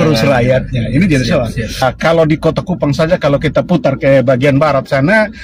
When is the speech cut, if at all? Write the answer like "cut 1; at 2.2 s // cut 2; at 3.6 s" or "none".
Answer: cut 1; at 1.8 s